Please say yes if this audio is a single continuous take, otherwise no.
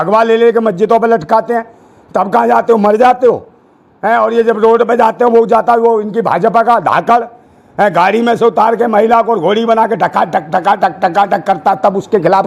yes